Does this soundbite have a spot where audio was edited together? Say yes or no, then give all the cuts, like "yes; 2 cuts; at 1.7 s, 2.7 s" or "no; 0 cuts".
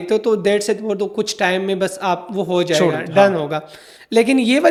no; 0 cuts